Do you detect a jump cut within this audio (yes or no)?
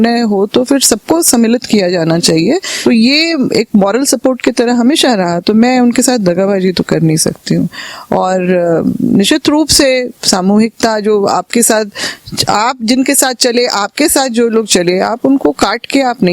yes